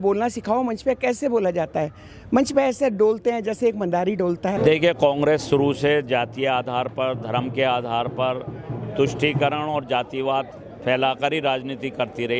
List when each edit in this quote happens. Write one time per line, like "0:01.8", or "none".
0:04.6